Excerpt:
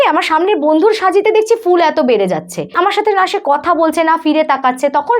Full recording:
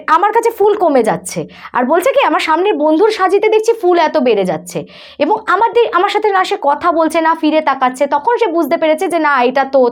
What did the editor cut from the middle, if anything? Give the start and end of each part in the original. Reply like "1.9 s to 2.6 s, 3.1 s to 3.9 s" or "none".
4.9 s to 5.9 s